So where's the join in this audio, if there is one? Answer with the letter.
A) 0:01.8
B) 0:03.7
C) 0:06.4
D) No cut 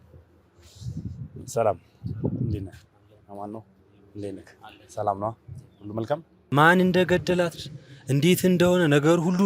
C